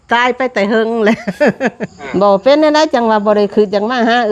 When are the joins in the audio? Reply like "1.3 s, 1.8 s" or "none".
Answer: 1.9 s